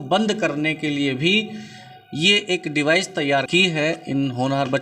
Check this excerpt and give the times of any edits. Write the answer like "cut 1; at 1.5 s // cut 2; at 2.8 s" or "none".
cut 1; at 3.5 s

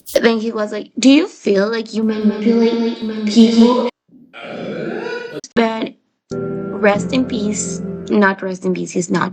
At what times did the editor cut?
cut 1; at 5.4 s

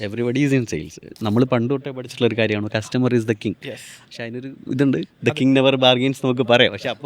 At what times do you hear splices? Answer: cut 1; at 1.1 s

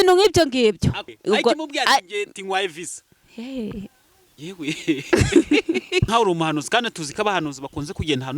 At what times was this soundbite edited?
cut 1; at 1.1 s // cut 2; at 6.1 s

